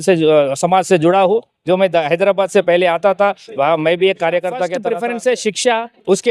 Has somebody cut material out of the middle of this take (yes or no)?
yes